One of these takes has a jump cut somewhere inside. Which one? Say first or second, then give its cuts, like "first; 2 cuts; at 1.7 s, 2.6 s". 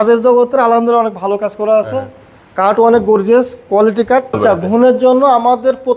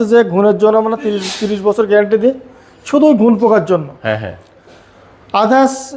first; 1 cut; at 4.4 s